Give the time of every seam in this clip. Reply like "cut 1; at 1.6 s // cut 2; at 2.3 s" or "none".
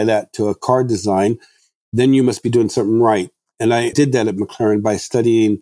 cut 1; at 3.6 s